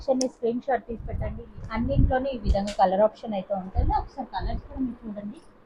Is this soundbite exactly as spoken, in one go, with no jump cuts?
no; 1 cut; at 1.3 s

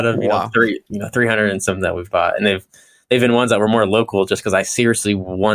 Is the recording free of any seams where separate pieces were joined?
yes; 0 cuts

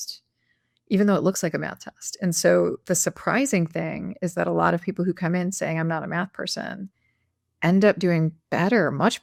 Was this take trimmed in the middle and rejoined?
no; 0 cuts

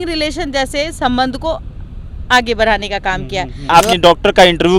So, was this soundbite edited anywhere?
yes; 1 cut; at 3.7 s

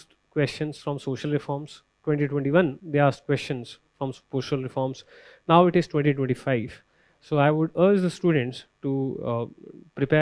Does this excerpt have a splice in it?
no; 0 cuts

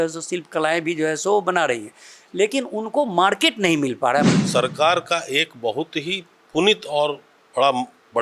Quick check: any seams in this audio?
yes; 1 cut; at 4.3 s

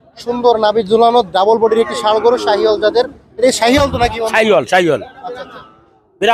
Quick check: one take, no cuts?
yes; 0 cuts

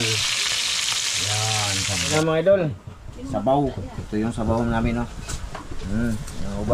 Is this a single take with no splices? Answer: no; 1 cut; at 2.1 s

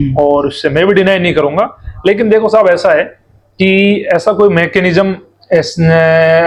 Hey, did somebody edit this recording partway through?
no; 0 cuts

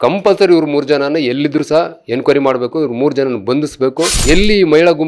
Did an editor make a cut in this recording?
yes; 1 cut; at 4.1 s

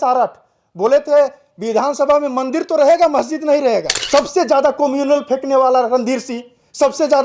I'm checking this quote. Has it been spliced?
yes; 1 cut; at 3.9 s

